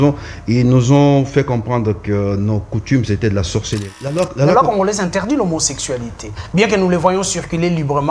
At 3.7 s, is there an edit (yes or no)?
yes